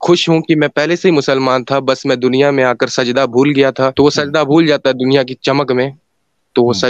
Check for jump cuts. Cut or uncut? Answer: cut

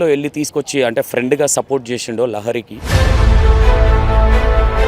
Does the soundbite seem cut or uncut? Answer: cut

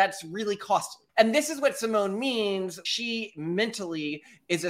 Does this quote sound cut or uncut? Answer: cut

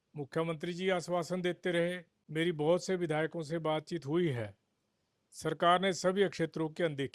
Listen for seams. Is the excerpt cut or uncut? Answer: cut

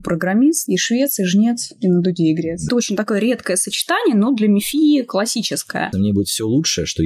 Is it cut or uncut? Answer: cut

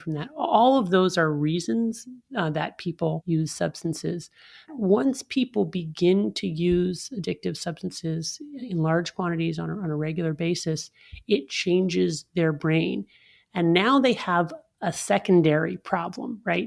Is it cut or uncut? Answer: cut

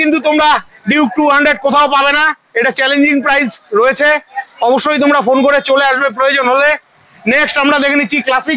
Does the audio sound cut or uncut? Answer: uncut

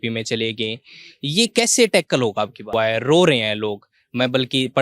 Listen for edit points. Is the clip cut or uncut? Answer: cut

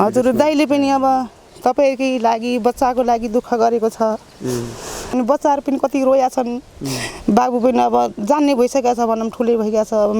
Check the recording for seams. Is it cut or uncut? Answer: cut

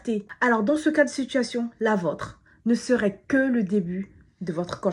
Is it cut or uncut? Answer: uncut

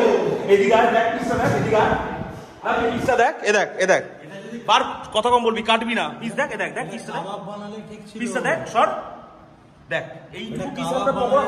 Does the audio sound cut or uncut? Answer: uncut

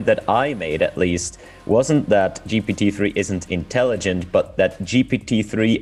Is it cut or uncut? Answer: uncut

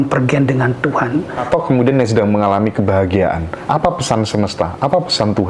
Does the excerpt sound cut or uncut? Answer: cut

